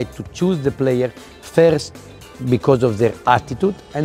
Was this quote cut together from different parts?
no; 0 cuts

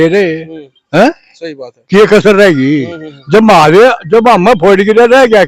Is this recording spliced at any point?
no; 0 cuts

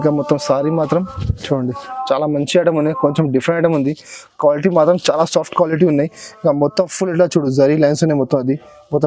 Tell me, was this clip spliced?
no; 0 cuts

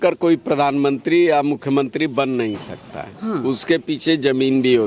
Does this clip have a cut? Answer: no; 0 cuts

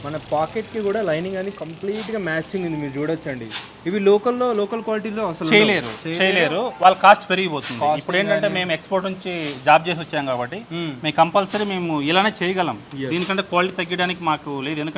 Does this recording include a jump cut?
no; 0 cuts

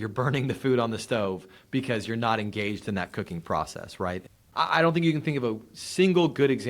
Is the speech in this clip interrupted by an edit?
yes; 1 cut; at 4.3 s

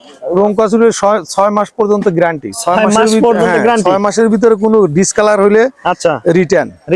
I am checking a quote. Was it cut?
no; 0 cuts

